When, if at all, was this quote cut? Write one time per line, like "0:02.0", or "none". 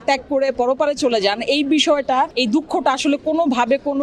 0:02.3